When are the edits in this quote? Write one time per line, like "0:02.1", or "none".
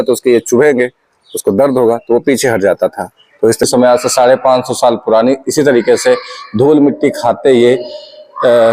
0:03.6